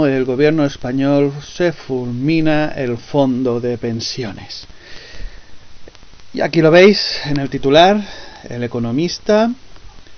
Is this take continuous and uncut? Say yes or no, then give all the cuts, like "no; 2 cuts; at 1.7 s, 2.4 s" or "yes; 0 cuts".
yes; 0 cuts